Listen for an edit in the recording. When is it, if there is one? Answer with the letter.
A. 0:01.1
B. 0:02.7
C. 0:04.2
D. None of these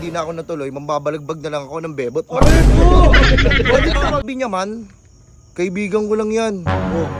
C